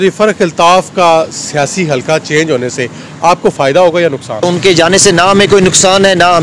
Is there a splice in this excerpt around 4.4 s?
yes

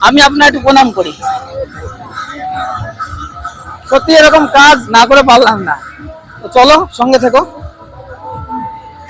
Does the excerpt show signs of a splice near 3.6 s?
no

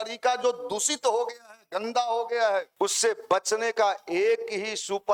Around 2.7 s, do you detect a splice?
yes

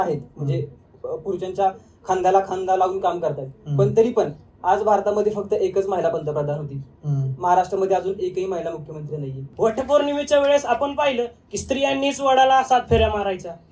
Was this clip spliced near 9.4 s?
yes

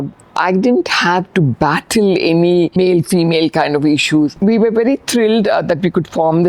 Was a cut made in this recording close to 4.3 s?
yes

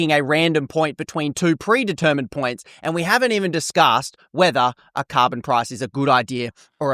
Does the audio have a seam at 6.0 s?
no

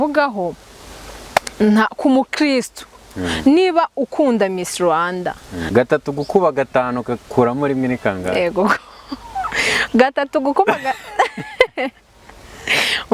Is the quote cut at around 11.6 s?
no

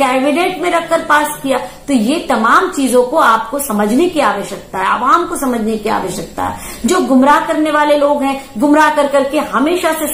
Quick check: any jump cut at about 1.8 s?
no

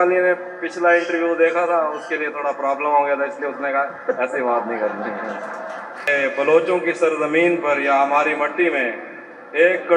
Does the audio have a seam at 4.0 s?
no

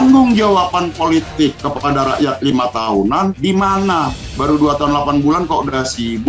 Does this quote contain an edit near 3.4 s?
yes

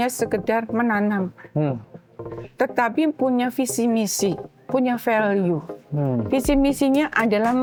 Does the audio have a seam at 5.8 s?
no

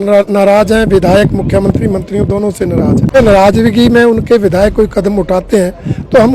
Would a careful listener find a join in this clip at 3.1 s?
yes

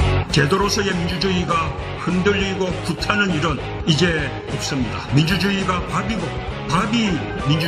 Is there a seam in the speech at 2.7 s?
yes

